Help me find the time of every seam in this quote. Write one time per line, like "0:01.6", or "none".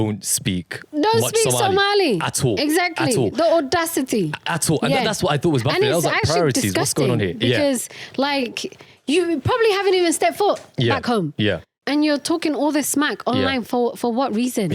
none

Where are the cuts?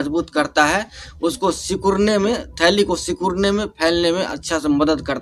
none

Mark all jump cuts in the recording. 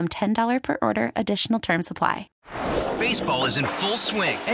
0:02.3

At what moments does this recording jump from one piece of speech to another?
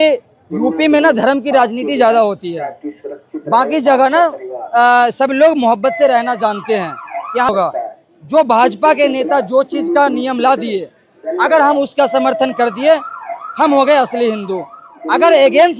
0:07.5

